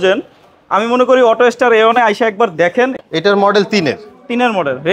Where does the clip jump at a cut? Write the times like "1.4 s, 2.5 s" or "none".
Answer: 3.0 s